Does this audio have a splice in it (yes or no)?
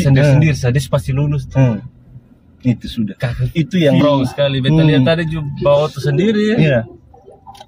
yes